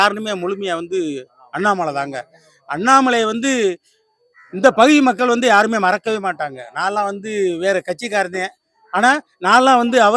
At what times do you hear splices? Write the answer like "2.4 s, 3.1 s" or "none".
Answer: none

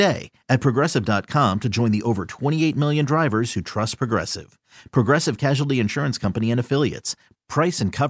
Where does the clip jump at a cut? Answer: none

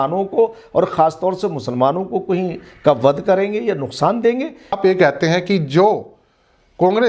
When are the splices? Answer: 4.8 s

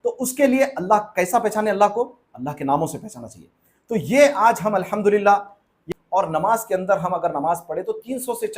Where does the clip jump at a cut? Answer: 5.9 s

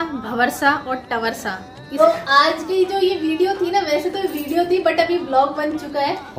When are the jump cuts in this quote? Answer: 1.9 s

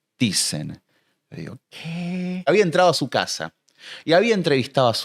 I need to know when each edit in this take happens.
2.5 s

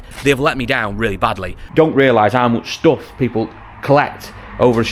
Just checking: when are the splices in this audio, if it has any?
1.6 s

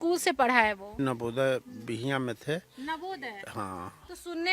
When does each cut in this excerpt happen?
1.0 s

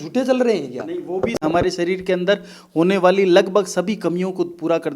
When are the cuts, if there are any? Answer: 1.4 s

